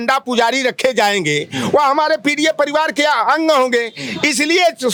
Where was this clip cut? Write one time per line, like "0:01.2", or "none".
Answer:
none